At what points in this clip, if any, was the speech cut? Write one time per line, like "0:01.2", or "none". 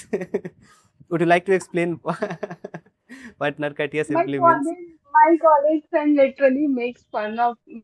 none